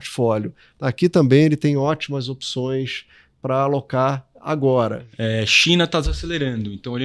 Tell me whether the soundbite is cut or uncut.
cut